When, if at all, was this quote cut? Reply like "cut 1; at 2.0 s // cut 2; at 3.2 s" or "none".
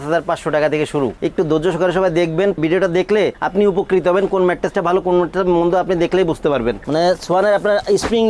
cut 1; at 1.2 s // cut 2; at 6.8 s